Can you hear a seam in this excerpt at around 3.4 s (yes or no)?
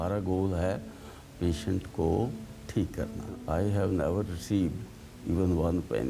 yes